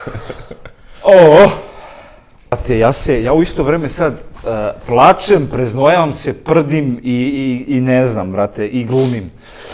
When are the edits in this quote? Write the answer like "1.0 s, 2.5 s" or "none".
2.6 s